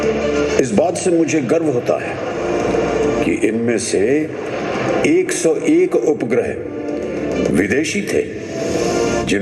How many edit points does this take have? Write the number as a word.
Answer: zero